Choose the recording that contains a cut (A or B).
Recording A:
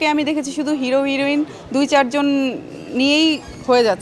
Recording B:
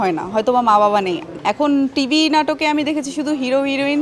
B